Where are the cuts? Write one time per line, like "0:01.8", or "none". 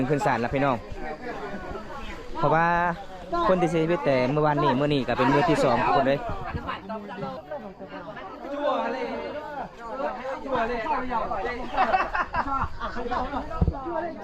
0:07.4